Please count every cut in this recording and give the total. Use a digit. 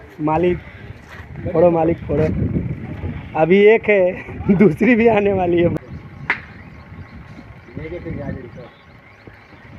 1